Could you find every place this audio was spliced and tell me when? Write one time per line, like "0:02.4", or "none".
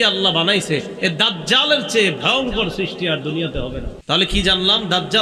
0:03.9